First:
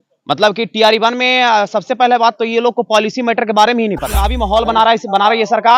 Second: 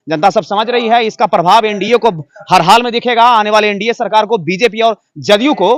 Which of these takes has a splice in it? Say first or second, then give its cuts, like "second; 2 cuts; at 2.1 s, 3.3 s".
first; 1 cut; at 4.4 s